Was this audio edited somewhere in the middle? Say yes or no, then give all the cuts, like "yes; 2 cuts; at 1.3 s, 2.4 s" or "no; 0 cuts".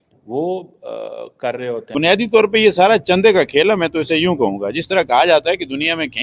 yes; 1 cut; at 2.0 s